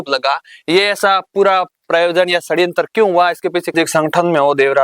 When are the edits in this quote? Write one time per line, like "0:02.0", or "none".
0:03.7